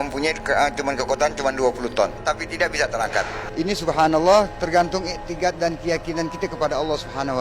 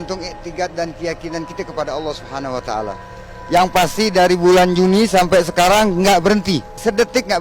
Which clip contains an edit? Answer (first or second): first